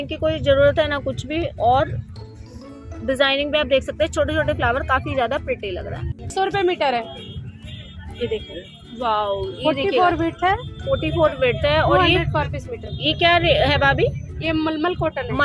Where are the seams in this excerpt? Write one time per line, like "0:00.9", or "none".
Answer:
none